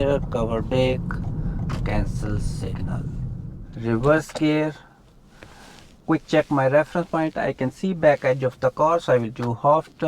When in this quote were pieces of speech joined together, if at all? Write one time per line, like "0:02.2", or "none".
0:03.5